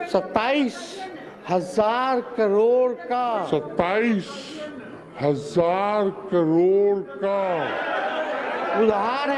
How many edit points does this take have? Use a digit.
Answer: 0